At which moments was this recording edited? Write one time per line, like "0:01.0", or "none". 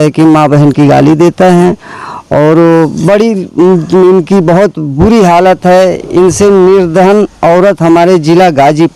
none